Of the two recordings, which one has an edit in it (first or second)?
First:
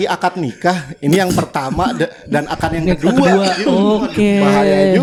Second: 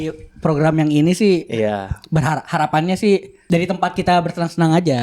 second